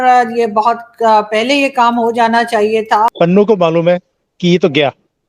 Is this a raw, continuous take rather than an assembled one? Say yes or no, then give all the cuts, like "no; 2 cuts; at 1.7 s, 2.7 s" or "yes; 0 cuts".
no; 1 cut; at 3.1 s